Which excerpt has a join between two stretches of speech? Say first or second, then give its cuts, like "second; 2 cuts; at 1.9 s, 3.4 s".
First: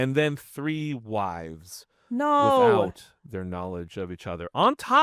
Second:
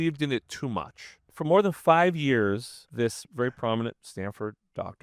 second; 3 cuts; at 1.3 s, 2.8 s, 4.0 s